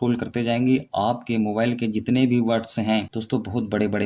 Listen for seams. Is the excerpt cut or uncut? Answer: cut